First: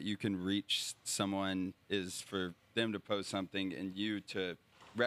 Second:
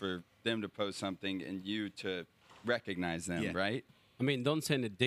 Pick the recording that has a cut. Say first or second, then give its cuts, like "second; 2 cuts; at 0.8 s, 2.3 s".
second; 1 cut; at 3.9 s